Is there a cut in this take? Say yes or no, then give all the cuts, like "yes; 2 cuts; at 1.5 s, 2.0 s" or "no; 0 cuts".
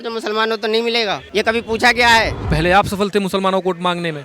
yes; 2 cuts; at 1.2 s, 2.4 s